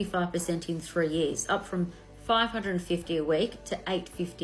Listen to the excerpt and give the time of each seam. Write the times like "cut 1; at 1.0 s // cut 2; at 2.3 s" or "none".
none